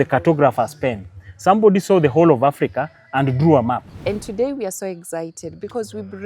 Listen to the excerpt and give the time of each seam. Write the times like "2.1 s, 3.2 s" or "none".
3.9 s